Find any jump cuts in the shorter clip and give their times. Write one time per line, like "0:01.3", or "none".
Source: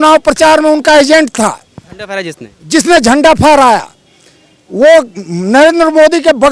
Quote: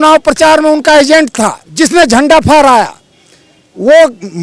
0:01.6